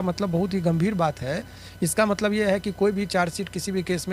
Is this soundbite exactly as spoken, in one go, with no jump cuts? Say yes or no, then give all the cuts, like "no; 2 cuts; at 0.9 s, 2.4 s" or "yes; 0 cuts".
yes; 0 cuts